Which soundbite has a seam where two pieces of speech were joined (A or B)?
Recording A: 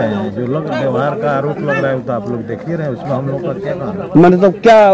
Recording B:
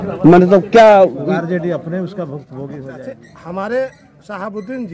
B